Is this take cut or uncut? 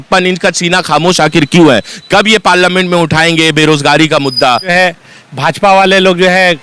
cut